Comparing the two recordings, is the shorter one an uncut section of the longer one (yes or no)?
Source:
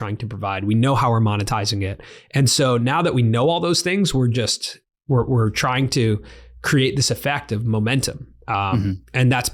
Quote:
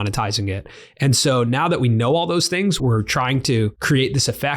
no